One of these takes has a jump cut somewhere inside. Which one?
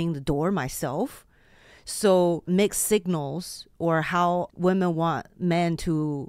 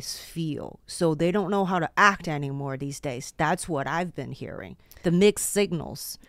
first; 2 cuts; at 2.4 s, 4.5 s

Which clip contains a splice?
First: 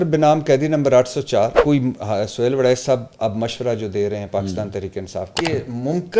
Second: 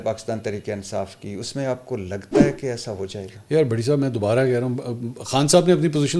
first; 2 cuts; at 1.6 s, 5.3 s

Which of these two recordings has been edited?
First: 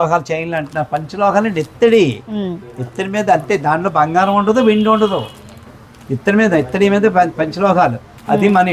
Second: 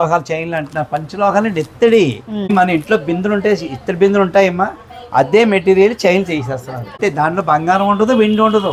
second; 2 cuts; at 2.5 s, 7.0 s

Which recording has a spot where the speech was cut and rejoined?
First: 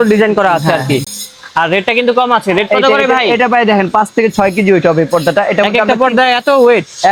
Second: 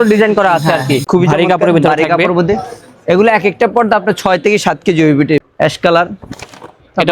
second; 2 cuts; at 1.0 s, 5.4 s

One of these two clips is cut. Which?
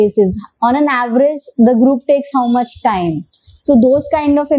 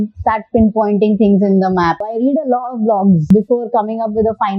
second; 2 cuts; at 2.0 s, 3.3 s

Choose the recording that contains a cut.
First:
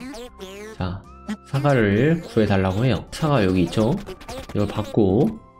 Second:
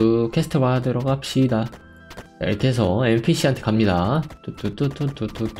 first; 1 cut; at 3.1 s

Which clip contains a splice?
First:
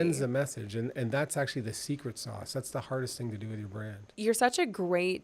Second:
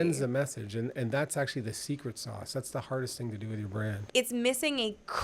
second; 1 cut; at 4.0 s

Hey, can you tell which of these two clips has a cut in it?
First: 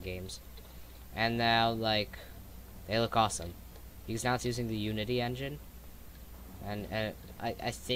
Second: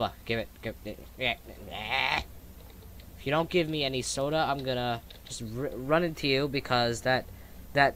second; 1 cut; at 3.9 s

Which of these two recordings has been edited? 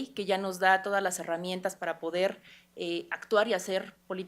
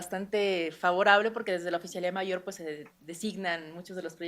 second; 1 cut; at 2.0 s

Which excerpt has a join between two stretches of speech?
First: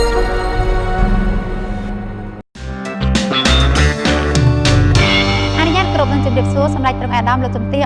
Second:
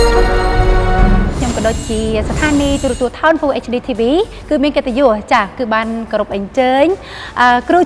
second; 1 cut; at 1.3 s

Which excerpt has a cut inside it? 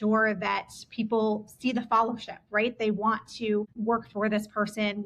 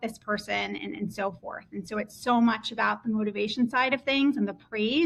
first; 1 cut; at 3.8 s

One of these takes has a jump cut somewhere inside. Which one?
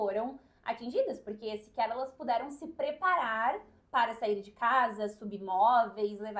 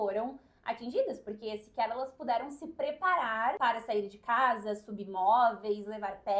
second; 1 cut; at 3.6 s

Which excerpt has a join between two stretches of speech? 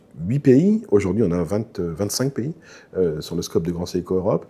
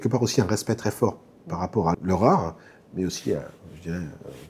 second; 1 cut; at 1.9 s

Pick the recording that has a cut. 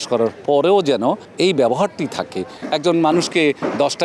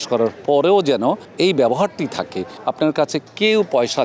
first; 1 cut; at 2.5 s

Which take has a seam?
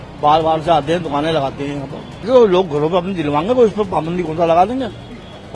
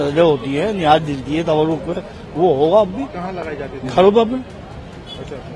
first; 1 cut; at 2.2 s

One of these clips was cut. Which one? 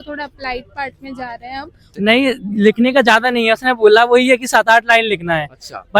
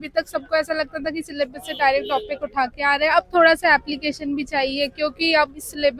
first; 1 cut; at 1.9 s

